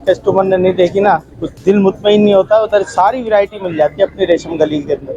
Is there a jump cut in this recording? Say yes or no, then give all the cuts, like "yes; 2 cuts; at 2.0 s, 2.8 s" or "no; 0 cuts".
no; 0 cuts